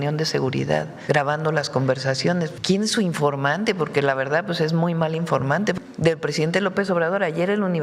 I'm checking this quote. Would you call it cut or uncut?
cut